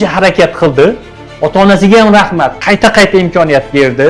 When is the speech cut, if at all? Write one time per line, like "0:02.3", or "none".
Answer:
none